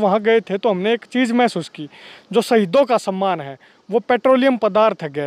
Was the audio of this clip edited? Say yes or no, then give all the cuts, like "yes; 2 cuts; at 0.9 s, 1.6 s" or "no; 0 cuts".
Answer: no; 0 cuts